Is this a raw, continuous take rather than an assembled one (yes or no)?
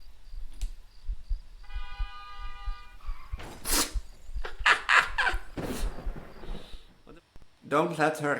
no